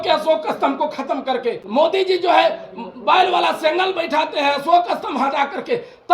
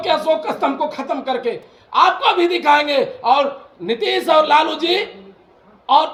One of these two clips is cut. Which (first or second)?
first